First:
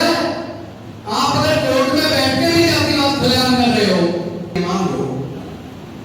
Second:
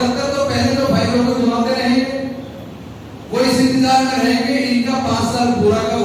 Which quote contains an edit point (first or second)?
first